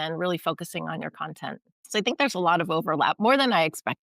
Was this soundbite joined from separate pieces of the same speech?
yes; 1 cut; at 1.7 s

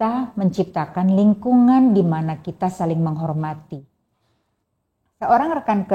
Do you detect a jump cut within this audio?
no; 0 cuts

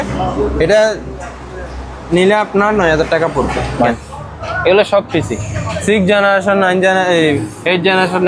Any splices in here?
yes; 1 cut; at 3.9 s

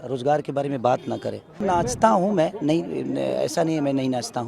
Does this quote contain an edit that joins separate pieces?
yes; 1 cut; at 1.6 s

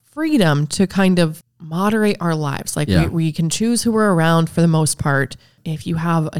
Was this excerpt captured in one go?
no; 2 cuts; at 1.4 s, 5.6 s

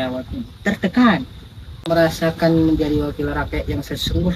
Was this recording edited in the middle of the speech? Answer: yes; 1 cut; at 1.9 s

